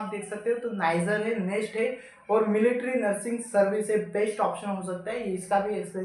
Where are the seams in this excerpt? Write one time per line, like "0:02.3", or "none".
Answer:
none